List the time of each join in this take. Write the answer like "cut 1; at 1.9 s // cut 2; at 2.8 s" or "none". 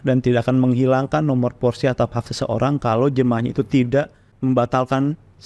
cut 1; at 4.2 s